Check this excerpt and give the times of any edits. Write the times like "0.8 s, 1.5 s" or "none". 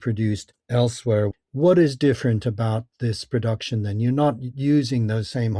1.3 s